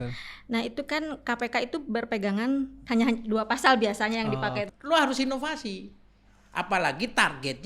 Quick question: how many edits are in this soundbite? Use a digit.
1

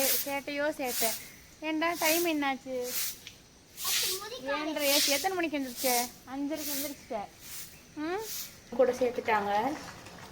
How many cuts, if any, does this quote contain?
1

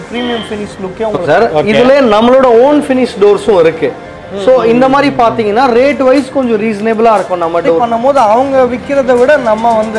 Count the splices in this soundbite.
2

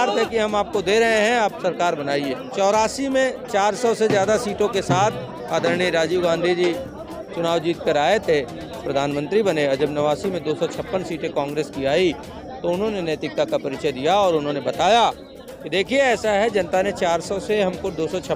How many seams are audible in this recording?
1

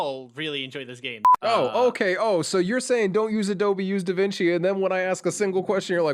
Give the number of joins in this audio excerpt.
1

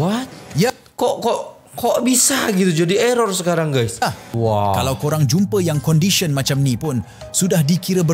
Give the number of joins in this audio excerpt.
1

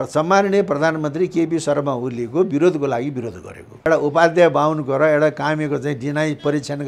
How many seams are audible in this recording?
1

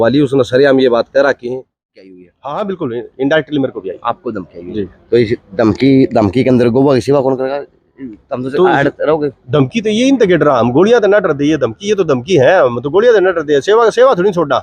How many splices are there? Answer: 1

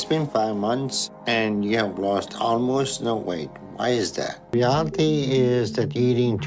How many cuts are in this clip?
0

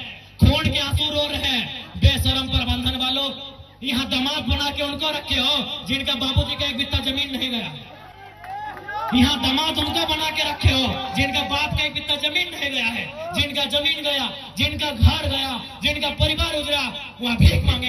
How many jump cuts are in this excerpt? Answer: 0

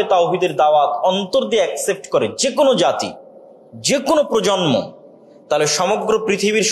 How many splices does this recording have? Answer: 0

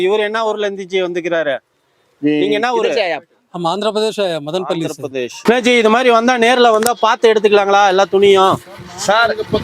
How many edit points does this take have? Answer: 1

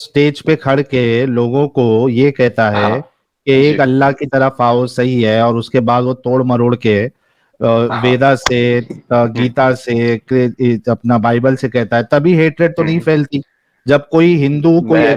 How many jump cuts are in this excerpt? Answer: 0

